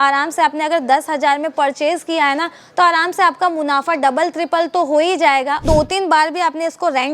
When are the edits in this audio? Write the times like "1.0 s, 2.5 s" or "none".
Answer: 5.6 s